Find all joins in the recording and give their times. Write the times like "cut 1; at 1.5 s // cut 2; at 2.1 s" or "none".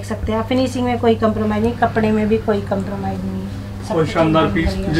none